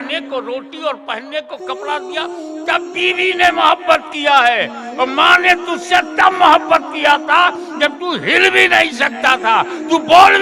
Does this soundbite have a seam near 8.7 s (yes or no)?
no